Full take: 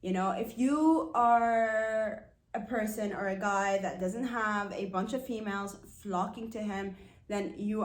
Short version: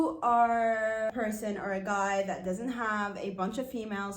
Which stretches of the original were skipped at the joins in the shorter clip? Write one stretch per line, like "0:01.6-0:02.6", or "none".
0:02.0-0:02.7

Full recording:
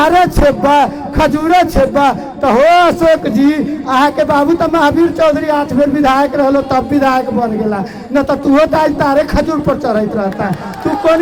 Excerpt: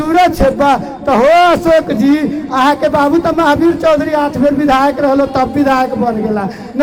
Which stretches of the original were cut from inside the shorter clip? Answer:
none

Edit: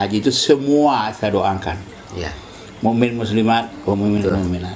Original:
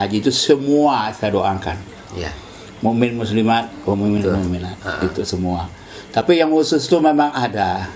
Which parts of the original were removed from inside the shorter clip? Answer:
none

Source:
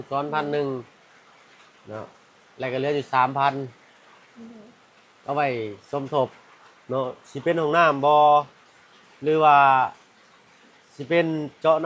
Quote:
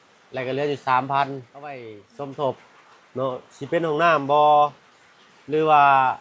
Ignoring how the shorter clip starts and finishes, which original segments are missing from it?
0:04.2-0:05.7

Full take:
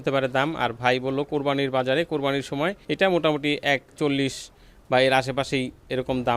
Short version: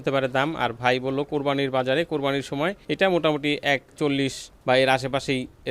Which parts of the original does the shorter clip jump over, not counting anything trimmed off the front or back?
0:04.5-0:04.7

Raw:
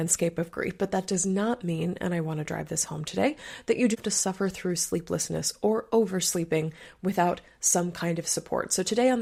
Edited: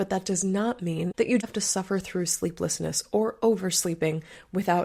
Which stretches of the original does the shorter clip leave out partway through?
0:01.9-0:03.6

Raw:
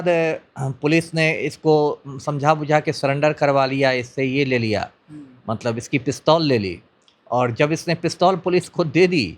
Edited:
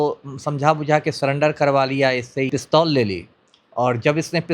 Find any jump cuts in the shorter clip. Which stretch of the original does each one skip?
0:04.3-0:06.0

